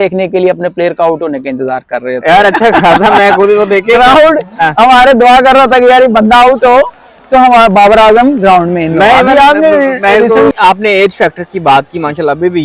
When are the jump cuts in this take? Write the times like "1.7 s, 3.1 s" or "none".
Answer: 10.5 s